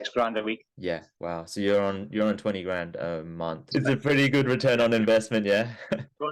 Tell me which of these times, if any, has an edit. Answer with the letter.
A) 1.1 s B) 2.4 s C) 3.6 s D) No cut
C